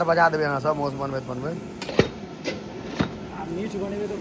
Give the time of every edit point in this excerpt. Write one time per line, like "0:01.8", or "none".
none